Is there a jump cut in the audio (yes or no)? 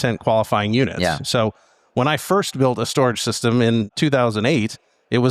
yes